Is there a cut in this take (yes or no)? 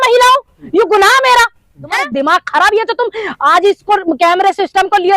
yes